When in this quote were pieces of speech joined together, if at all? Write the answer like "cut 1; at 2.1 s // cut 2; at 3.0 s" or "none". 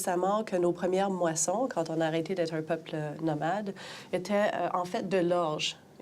cut 1; at 1.0 s